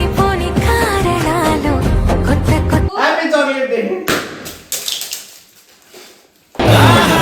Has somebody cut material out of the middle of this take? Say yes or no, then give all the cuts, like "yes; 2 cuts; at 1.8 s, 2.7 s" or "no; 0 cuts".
yes; 1 cut; at 2.9 s